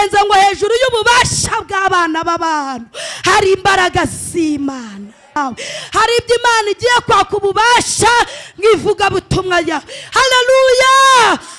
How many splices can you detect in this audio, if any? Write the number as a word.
one